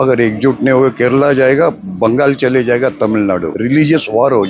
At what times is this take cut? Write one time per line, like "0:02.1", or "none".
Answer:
0:03.5